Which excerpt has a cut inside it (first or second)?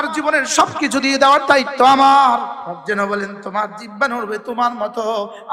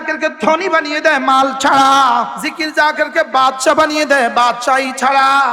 second